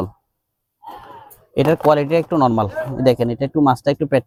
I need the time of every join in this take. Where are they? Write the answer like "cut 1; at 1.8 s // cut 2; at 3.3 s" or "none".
none